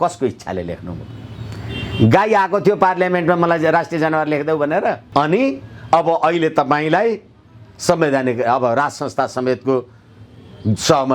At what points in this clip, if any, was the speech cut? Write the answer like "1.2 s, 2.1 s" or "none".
5.0 s